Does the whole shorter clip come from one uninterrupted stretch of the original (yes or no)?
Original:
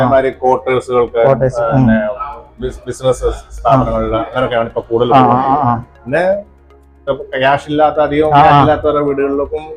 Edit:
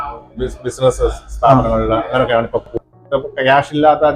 no